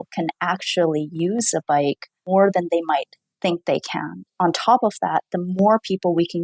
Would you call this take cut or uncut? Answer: cut